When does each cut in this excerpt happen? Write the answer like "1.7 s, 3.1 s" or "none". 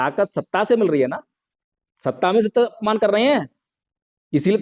2.8 s